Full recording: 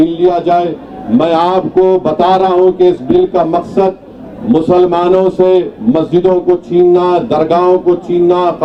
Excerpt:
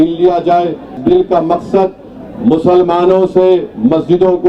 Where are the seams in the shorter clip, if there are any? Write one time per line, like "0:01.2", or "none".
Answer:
0:01.0